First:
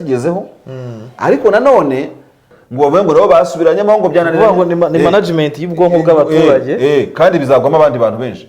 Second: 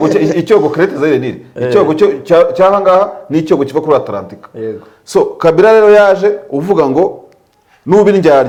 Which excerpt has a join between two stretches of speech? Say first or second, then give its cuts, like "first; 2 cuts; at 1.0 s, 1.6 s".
first; 1 cut; at 2.4 s